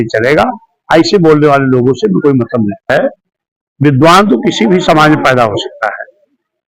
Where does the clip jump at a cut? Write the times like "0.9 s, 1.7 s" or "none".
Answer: 2.8 s